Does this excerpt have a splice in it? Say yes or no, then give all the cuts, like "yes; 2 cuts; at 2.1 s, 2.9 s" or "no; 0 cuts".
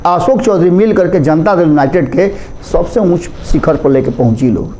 no; 0 cuts